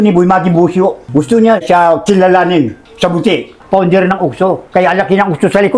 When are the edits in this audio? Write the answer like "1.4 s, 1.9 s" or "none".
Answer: 1.0 s, 3.6 s